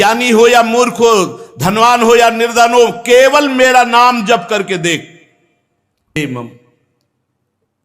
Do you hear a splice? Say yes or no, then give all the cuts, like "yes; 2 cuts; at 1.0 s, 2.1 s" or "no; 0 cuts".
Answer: yes; 1 cut; at 6.2 s